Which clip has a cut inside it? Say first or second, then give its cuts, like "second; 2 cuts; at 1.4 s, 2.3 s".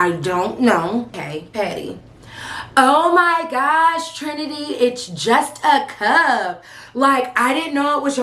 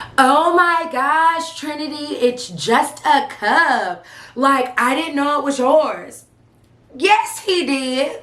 first; 1 cut; at 1.2 s